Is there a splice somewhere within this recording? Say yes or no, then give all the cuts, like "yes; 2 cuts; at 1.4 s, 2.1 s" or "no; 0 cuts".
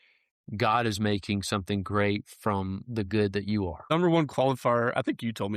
yes; 1 cut; at 3.9 s